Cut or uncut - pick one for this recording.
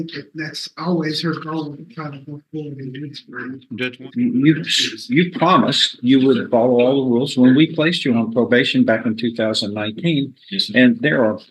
cut